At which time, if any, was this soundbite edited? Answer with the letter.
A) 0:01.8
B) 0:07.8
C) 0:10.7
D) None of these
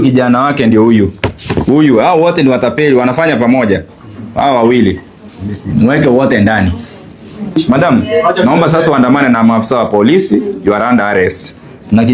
B